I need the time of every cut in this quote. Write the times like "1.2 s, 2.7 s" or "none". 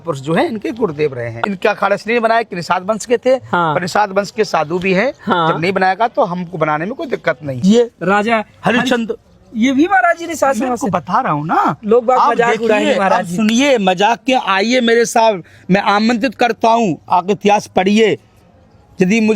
1.3 s, 7.5 s